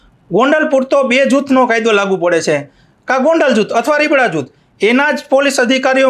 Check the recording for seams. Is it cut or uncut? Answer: uncut